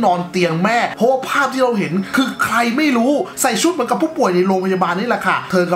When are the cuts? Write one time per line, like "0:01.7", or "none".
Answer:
0:00.9
0:03.3